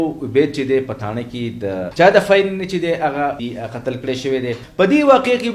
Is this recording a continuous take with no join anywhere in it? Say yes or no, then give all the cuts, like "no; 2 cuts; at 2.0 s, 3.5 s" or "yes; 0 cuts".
no; 3 cuts; at 1.9 s, 3.4 s, 4.6 s